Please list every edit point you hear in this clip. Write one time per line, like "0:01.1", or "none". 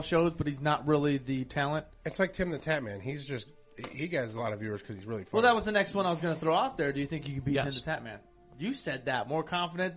none